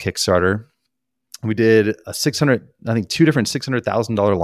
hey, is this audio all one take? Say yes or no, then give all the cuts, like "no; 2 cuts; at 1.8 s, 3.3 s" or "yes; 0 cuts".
no; 1 cut; at 2.1 s